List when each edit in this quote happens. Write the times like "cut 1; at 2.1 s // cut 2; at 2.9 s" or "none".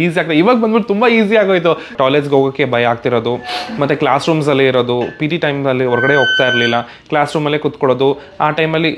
cut 1; at 1.9 s